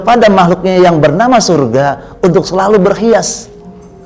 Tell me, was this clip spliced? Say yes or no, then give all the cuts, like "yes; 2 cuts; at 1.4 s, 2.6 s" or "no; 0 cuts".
no; 0 cuts